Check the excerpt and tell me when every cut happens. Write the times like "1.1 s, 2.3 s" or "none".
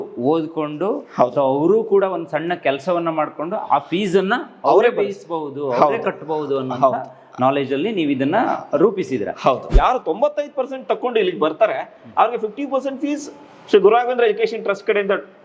9.7 s